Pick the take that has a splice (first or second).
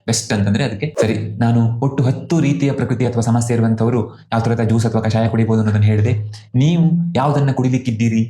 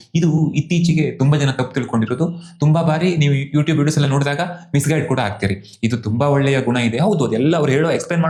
first